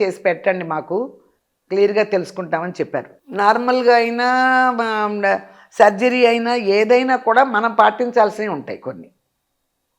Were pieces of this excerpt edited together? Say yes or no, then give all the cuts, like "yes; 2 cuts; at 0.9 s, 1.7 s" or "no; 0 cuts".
yes; 1 cut; at 3.1 s